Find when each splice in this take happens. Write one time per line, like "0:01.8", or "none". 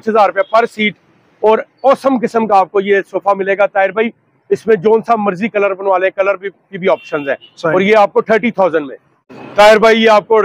none

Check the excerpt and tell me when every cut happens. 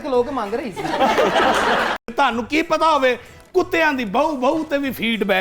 0:02.0

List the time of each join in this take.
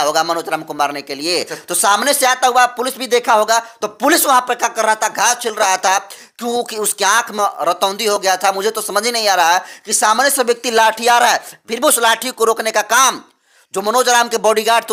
none

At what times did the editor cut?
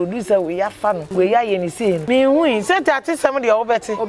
0:01.0
0:02.0

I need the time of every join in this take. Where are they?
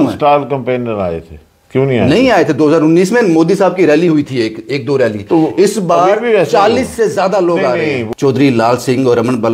0:08.0

